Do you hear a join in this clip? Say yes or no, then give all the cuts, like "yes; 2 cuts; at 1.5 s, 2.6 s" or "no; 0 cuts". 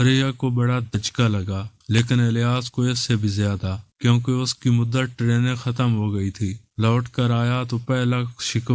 yes; 1 cut; at 0.9 s